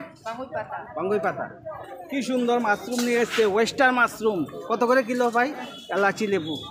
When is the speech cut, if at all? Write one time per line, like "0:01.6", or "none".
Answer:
0:05.8